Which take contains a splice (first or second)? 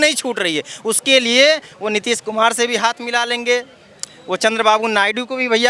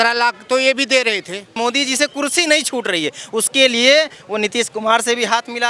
second